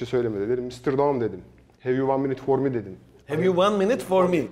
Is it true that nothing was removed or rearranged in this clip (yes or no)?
yes